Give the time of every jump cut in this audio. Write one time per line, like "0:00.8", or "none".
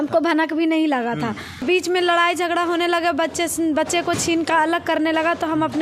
0:01.6